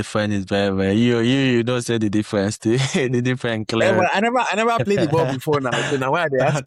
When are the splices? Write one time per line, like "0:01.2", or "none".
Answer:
none